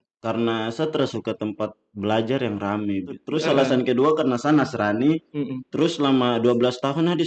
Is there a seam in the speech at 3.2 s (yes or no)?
yes